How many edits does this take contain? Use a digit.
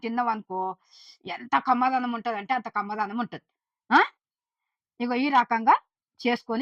0